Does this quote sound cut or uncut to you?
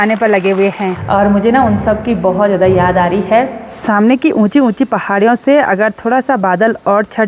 cut